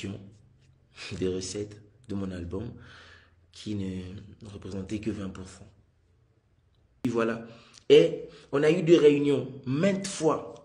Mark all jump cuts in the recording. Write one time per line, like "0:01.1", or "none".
0:07.0